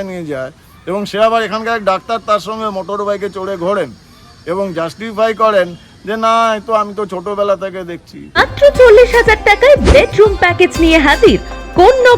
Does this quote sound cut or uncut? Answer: cut